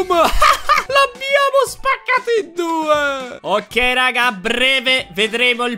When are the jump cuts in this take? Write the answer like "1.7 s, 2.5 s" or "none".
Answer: 3.3 s

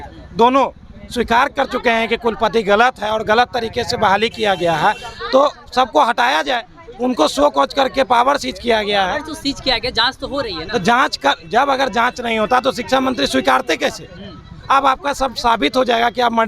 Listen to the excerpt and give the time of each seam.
none

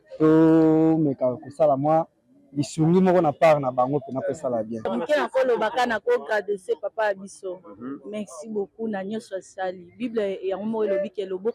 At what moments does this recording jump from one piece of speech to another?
4.8 s

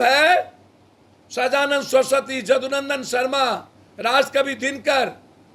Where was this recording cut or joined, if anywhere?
none

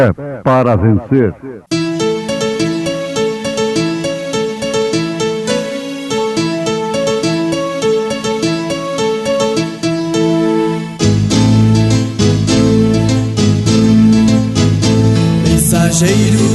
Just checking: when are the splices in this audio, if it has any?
1.5 s

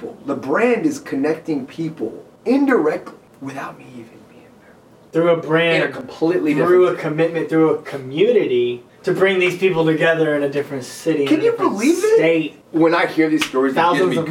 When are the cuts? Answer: 2.3 s, 3.3 s, 5.1 s, 8.9 s, 12.6 s

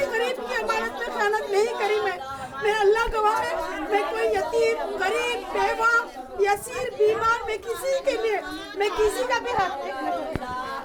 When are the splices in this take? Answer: none

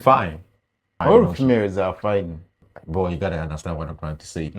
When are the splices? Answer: 1.0 s, 2.6 s

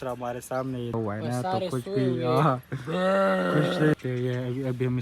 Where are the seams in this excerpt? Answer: 0.9 s, 3.9 s

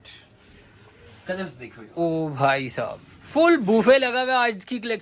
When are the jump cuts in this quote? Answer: none

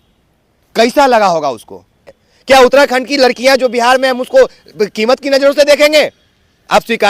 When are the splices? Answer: 2.1 s

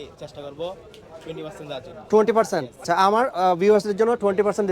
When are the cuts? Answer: 2.8 s

